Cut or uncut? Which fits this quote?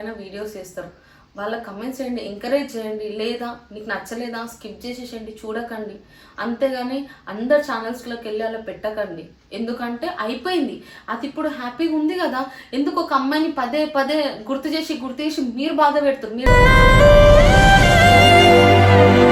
uncut